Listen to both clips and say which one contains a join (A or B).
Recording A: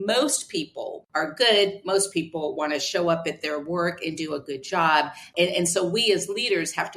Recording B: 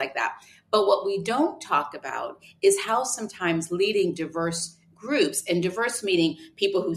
A